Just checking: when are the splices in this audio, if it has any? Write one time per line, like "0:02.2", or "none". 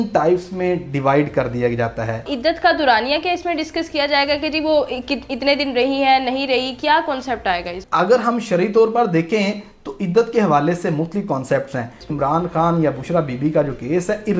0:02.3
0:07.8
0:12.1